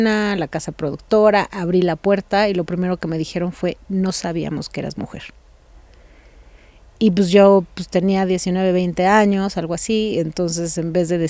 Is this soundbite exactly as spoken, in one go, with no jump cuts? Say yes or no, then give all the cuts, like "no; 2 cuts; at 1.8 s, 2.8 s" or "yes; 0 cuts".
yes; 0 cuts